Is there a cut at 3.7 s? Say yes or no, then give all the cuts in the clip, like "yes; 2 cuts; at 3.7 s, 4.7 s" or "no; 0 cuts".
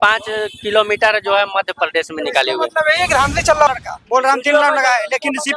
yes; 1 cut; at 3.7 s